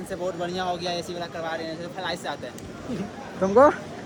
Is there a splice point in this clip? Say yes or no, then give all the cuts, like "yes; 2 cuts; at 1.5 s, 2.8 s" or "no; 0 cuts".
no; 0 cuts